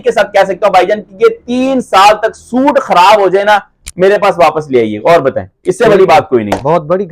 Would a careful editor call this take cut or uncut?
uncut